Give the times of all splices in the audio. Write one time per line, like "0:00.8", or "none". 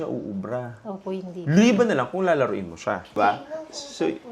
0:03.2